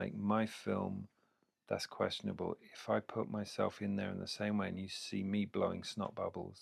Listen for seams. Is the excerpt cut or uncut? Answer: uncut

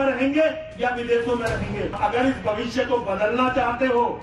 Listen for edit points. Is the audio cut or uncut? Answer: cut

